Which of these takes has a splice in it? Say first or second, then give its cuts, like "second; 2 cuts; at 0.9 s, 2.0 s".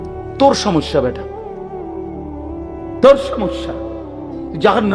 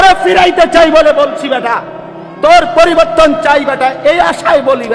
first; 2 cuts; at 1.1 s, 3.0 s